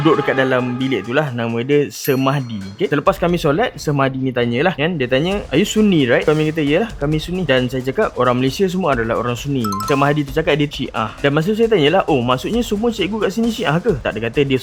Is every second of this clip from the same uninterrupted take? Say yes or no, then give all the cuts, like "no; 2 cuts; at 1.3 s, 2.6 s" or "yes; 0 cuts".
yes; 0 cuts